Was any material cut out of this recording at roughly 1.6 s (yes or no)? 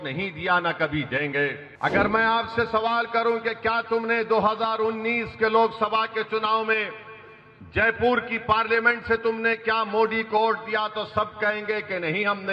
yes